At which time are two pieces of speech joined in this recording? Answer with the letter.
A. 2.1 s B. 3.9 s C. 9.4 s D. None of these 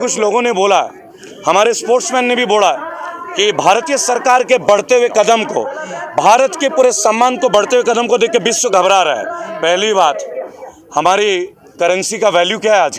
D